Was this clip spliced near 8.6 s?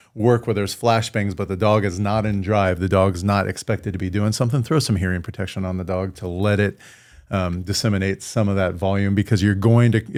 no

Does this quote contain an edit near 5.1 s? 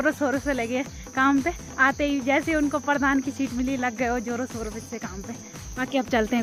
no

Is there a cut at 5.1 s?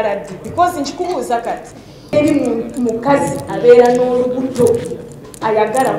no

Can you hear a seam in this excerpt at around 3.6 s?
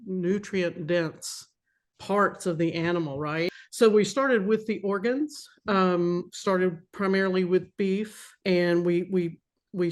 yes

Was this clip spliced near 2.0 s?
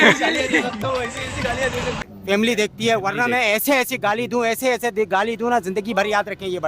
yes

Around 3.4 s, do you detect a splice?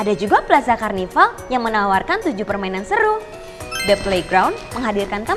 no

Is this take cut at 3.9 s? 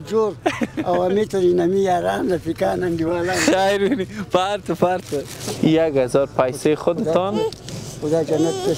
no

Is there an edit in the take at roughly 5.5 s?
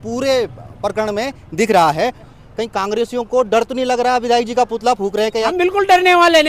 yes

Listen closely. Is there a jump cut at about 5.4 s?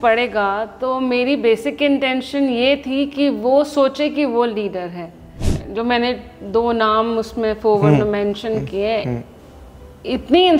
yes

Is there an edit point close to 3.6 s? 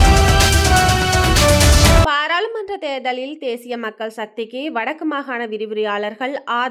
no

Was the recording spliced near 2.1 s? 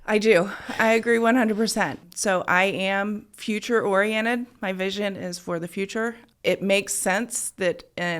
yes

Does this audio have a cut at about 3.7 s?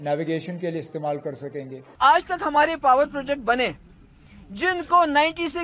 no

